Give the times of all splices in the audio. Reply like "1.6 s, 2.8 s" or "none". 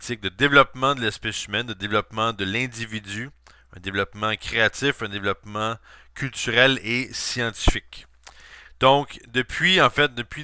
2.5 s